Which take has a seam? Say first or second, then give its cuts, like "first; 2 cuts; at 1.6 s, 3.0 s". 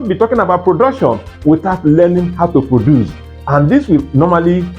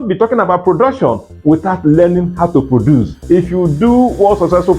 second; 1 cut; at 3.1 s